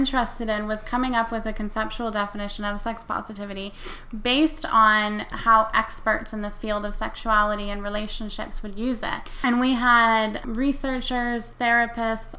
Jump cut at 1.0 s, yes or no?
no